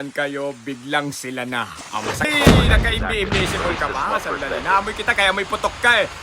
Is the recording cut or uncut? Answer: cut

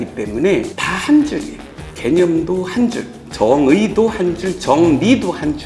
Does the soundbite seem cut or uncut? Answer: uncut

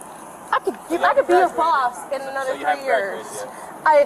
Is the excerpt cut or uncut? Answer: uncut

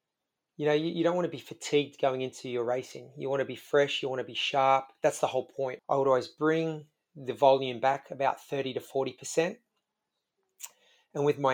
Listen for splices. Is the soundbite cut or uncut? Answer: cut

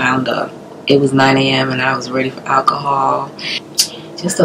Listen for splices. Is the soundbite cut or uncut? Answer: cut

